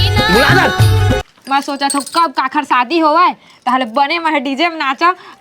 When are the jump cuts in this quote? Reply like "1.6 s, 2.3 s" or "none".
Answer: 1.3 s